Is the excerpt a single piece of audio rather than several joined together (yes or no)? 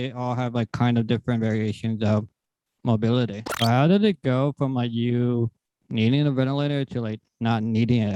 no